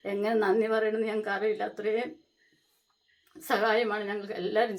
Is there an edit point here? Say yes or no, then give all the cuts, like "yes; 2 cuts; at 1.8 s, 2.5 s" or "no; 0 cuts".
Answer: no; 0 cuts